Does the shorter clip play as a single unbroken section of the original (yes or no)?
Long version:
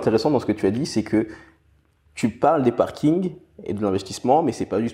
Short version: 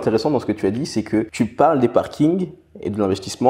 no